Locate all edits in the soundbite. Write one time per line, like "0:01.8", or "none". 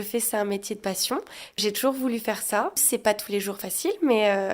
0:01.6
0:02.8